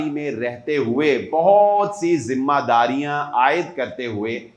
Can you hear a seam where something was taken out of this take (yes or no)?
no